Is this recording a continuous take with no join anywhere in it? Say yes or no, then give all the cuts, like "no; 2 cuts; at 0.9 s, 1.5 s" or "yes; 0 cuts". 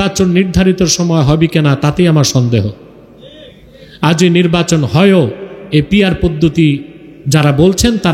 yes; 0 cuts